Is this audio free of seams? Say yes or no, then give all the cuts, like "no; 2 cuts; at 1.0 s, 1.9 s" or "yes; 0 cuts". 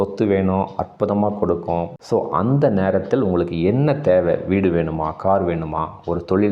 no; 1 cut; at 2.0 s